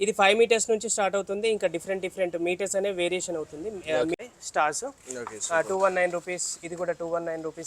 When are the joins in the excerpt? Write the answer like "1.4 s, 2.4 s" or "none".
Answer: 4.2 s